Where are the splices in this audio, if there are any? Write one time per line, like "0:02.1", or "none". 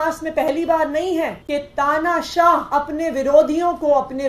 0:01.4
0:02.7

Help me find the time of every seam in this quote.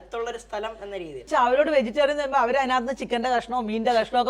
0:01.2

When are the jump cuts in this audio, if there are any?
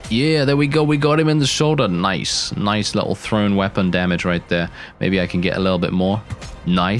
none

